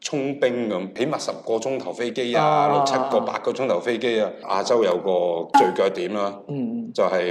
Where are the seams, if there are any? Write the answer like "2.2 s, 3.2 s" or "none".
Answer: 0.9 s, 4.4 s